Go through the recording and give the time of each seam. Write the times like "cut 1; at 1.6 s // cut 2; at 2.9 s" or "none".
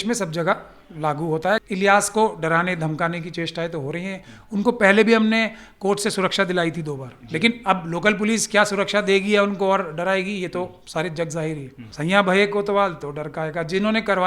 cut 1; at 1.6 s // cut 2; at 11.9 s

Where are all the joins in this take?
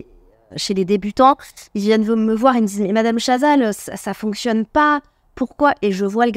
none

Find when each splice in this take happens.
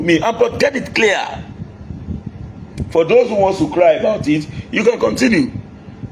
none

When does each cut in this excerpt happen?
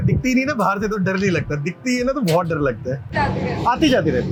none

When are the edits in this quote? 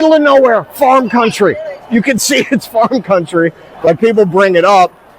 cut 1; at 3.7 s

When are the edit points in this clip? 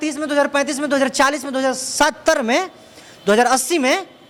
none

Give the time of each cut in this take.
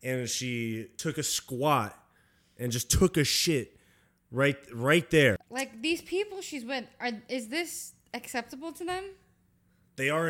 cut 1; at 0.9 s // cut 2; at 5.5 s

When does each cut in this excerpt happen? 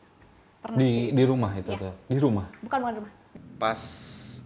cut 1; at 3.2 s

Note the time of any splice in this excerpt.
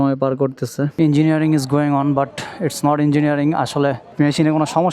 cut 1; at 0.9 s // cut 2; at 4.0 s

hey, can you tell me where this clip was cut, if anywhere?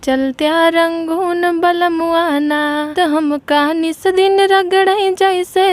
cut 1; at 2.9 s

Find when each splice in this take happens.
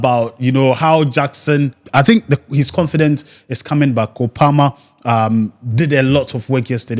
cut 1; at 1.8 s

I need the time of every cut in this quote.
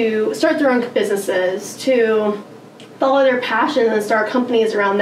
none

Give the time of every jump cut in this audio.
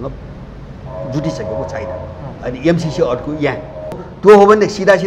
cut 1; at 4.1 s

